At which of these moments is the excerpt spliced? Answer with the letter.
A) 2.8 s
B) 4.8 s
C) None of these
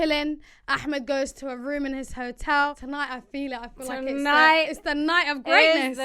A